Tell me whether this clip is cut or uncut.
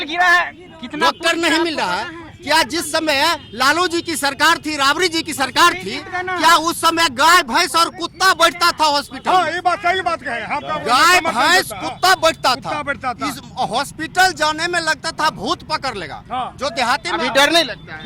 uncut